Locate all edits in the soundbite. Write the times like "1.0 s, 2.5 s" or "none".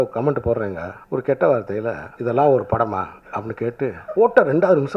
0.9 s, 2.0 s, 4.0 s